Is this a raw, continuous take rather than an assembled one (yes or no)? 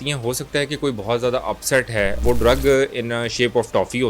no